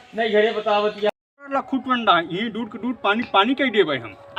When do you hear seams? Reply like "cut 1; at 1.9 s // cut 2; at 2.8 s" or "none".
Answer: cut 1; at 1.1 s